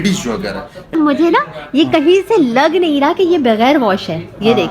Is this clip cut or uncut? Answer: cut